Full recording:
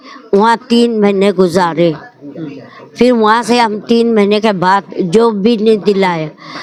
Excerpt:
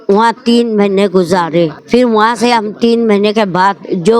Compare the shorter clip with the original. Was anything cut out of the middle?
yes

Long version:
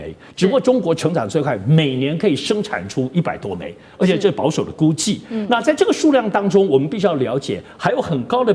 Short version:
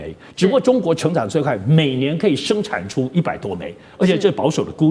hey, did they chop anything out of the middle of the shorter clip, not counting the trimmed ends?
no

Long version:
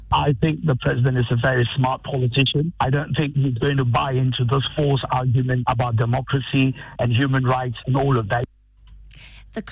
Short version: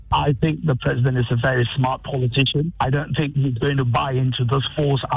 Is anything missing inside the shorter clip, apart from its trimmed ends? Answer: no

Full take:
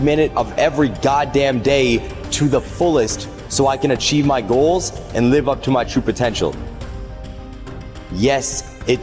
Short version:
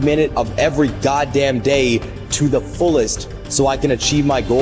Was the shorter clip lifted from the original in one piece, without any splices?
yes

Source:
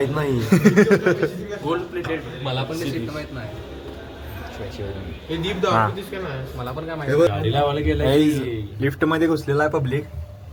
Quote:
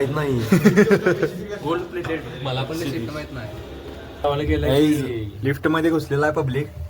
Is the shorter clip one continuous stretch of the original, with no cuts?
no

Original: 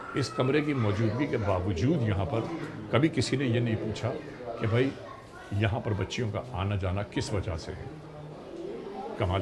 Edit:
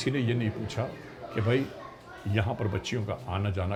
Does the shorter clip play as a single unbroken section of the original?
yes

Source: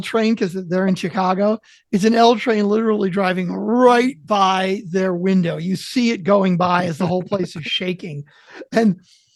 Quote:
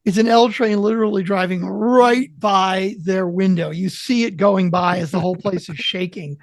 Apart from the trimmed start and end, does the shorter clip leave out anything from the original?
no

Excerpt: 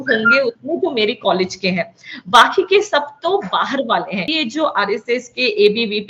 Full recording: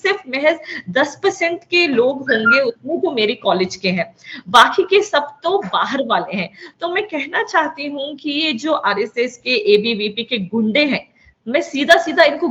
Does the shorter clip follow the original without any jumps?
no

